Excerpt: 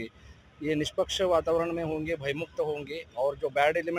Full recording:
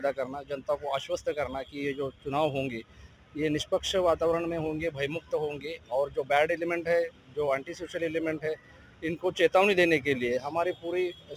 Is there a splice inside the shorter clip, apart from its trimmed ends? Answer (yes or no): no